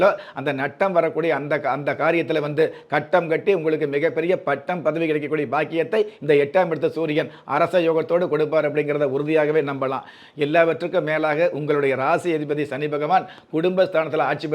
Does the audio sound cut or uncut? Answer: uncut